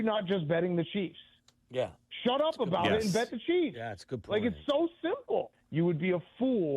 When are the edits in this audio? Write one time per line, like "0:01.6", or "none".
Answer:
0:05.6